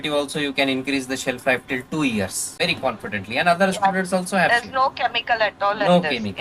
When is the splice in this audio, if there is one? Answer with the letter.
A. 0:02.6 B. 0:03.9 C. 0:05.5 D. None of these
A